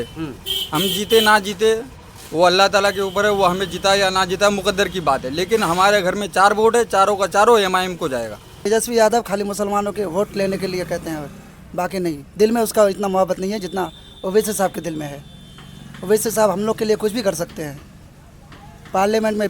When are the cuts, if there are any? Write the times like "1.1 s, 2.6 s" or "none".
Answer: 8.5 s